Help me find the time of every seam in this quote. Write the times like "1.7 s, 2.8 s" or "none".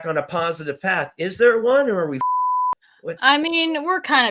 2.8 s